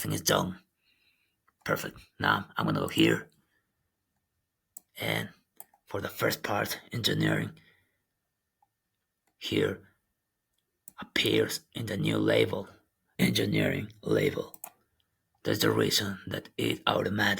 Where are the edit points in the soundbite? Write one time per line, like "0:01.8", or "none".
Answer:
0:13.2